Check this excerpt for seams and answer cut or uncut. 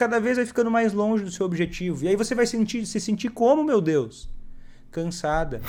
uncut